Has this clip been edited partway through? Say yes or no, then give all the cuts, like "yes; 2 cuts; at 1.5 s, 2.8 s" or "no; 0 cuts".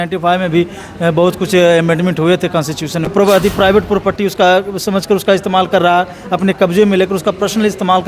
yes; 1 cut; at 3.1 s